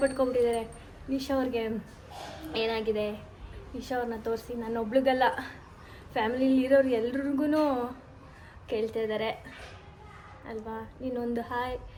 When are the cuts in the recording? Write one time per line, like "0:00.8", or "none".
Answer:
none